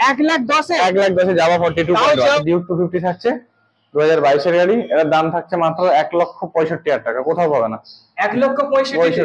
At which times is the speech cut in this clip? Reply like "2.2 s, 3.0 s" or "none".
2.4 s